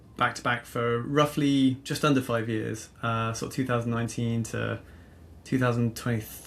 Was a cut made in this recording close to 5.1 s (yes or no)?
no